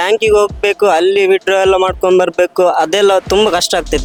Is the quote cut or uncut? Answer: uncut